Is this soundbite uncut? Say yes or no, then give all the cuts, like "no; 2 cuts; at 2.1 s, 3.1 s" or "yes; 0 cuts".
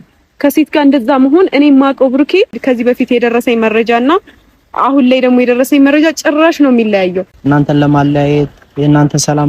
no; 2 cuts; at 2.6 s, 7.3 s